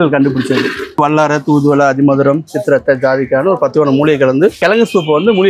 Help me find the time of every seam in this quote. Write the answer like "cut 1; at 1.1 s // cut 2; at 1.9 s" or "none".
cut 1; at 1.0 s // cut 2; at 4.6 s